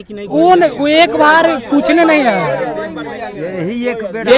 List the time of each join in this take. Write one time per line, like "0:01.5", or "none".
none